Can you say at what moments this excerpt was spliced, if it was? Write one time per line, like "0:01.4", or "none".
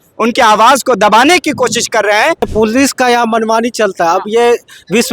0:02.5